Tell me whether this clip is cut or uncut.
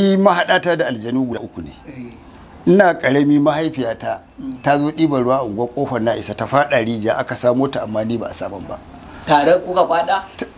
cut